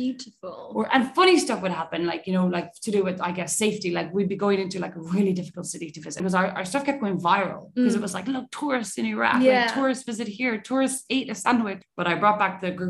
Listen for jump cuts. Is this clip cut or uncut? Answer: cut